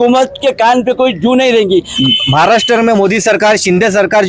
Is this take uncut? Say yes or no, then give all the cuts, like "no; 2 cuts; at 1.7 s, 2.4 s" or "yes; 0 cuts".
no; 1 cut; at 1.9 s